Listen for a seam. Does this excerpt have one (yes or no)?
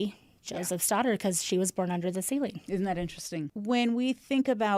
no